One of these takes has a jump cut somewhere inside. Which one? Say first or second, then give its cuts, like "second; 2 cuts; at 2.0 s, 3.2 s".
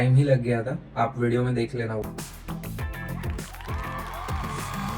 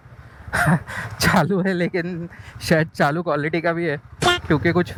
first; 1 cut; at 2.0 s